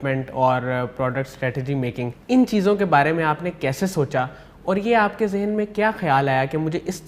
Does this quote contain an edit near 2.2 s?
yes; 1 cut; at 2.2 s

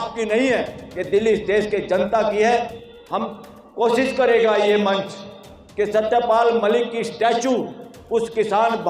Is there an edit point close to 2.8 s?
yes; 1 cut; at 2.8 s

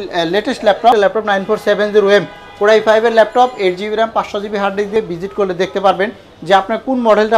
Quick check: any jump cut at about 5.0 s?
yes; 2 cuts; at 0.9 s, 5.0 s

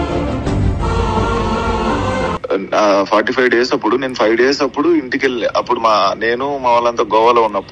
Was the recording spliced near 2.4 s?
yes; 1 cut; at 2.4 s

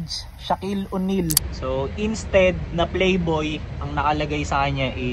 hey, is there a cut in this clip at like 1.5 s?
yes; 1 cut; at 1.5 s

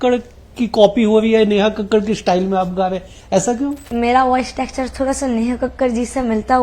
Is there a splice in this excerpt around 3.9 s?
yes; 1 cut; at 3.9 s

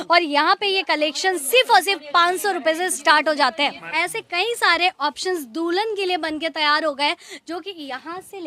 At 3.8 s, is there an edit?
yes; 1 cut; at 3.8 s

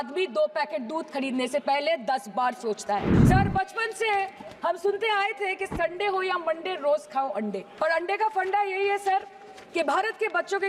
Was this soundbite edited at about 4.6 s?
no; 2 cuts; at 3.1 s, 7.6 s

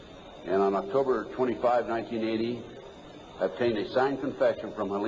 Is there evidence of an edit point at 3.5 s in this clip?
no; 1 cut; at 2.2 s

